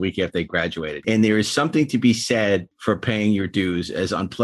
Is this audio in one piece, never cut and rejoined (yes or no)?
no